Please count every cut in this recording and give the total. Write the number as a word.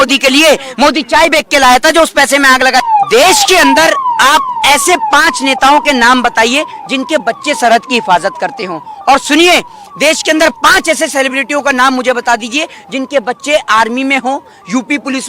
one